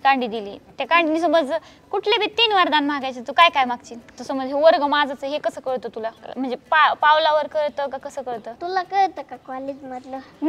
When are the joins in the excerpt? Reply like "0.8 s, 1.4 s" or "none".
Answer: 4.1 s, 6.2 s, 8.6 s